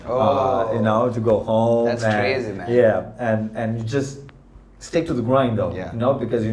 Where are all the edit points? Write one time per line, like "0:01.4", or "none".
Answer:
none

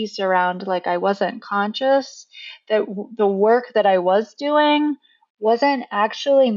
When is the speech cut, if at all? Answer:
none

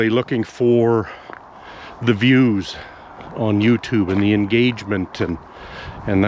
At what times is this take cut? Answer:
none

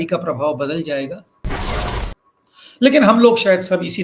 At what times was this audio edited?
none

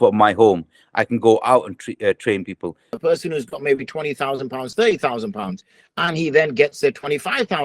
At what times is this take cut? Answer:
0:02.9

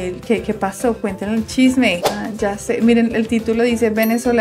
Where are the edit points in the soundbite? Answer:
0:02.1

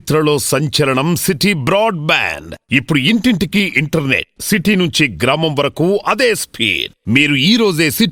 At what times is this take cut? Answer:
none

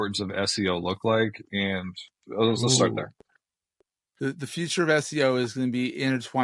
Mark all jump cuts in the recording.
none

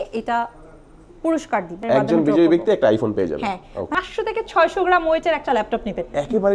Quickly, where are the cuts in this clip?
0:01.8
0:03.9

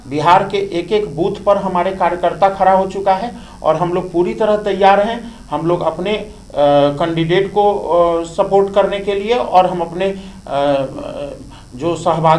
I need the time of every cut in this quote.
none

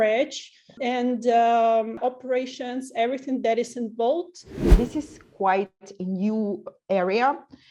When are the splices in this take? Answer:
0:00.8
0:02.0
0:04.6

